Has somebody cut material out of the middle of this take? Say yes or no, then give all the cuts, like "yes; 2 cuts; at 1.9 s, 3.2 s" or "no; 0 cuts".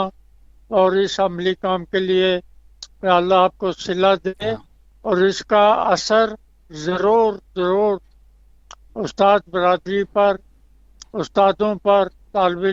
no; 0 cuts